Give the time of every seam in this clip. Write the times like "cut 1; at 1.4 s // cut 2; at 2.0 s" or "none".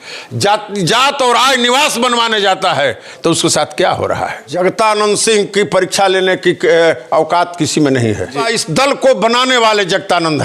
cut 1; at 4.5 s // cut 2; at 8.4 s